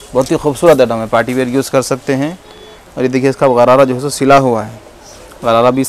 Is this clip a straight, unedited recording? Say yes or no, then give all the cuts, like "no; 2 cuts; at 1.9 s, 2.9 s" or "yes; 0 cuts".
yes; 0 cuts